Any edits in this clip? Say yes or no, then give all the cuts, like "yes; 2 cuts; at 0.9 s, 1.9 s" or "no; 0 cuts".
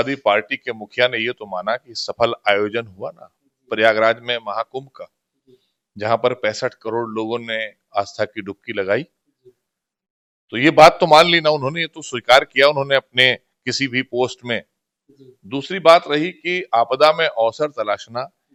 no; 0 cuts